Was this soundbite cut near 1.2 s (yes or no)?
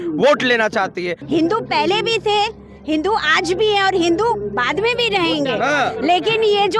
yes